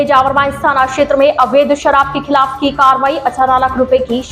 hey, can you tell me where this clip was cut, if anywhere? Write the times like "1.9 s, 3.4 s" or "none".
none